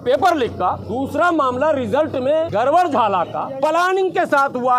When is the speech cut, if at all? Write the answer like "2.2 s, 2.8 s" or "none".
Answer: 0.8 s, 2.5 s, 3.4 s